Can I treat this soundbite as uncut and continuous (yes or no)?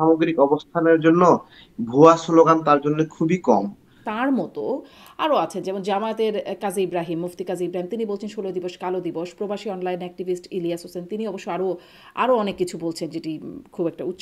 no